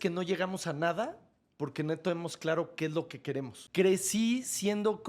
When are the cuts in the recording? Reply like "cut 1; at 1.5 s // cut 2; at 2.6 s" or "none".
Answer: cut 1; at 3.6 s